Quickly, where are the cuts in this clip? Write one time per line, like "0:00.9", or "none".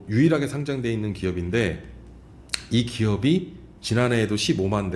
none